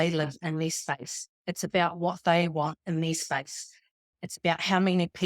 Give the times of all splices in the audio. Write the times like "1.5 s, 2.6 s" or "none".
4.0 s

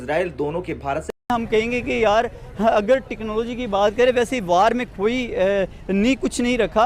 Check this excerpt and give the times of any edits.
1.0 s

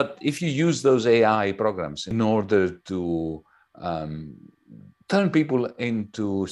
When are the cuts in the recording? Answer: 2.0 s

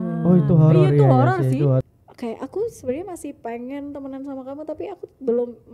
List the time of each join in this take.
1.8 s

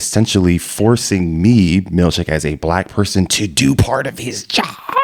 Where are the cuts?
none

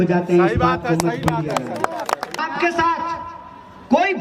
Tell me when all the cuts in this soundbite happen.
2.4 s

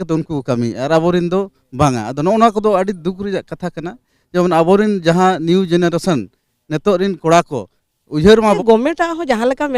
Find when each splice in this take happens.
8.6 s

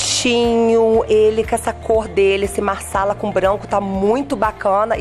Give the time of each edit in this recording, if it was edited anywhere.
1.0 s

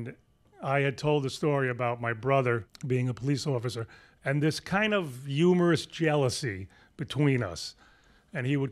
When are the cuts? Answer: 2.7 s

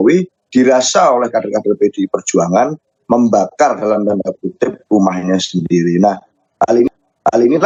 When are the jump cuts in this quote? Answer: none

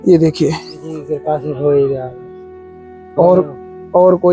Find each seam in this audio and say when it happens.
1.1 s

